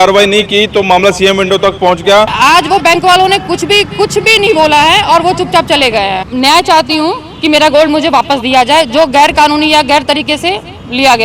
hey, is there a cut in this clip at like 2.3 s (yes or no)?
yes